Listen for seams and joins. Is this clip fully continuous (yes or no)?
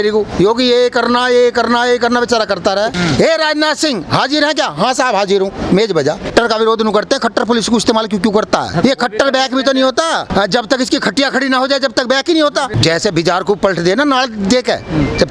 no